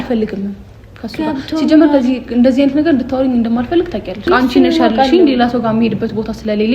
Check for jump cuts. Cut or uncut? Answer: cut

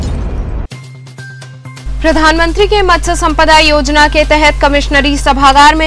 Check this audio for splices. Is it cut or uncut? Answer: cut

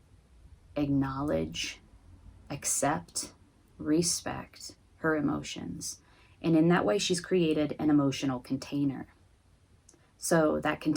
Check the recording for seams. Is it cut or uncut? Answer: uncut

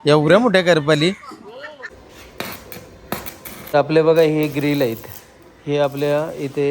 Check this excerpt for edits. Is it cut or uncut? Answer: cut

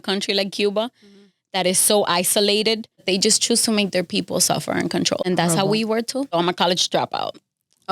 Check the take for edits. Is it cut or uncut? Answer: cut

